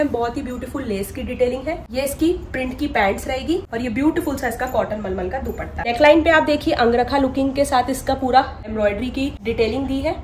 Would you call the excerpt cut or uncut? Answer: cut